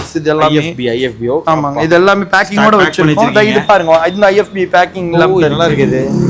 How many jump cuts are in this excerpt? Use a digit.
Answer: 0